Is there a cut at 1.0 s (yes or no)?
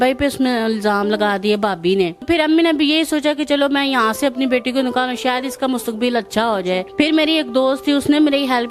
no